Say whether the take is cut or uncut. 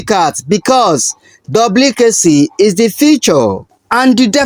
uncut